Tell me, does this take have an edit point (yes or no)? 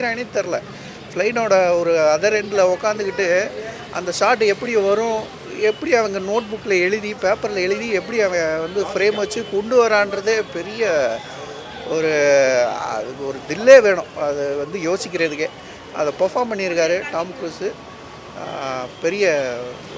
no